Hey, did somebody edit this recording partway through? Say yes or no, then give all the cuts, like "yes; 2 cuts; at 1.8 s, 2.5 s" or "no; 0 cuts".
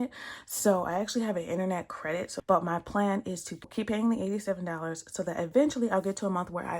yes; 2 cuts; at 2.3 s, 3.7 s